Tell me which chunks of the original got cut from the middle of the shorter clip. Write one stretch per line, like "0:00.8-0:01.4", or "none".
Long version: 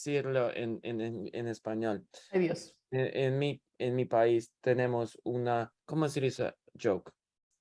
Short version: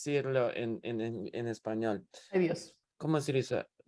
0:02.8-0:05.7